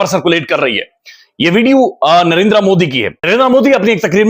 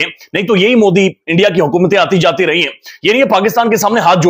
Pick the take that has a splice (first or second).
first